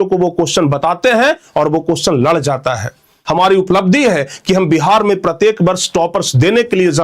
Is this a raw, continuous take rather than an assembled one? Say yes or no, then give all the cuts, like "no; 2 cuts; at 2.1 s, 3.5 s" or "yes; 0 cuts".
no; 1 cut; at 3.2 s